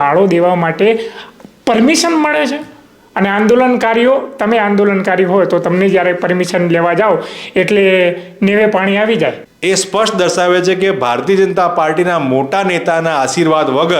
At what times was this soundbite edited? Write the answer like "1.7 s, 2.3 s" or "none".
9.5 s

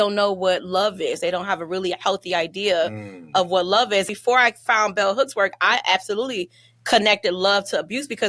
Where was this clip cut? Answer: 4.1 s

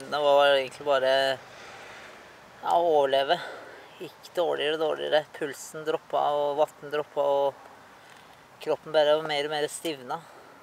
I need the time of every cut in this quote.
none

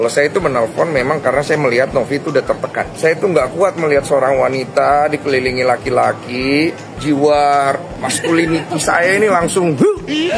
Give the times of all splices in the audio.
2.9 s, 6.9 s, 7.9 s

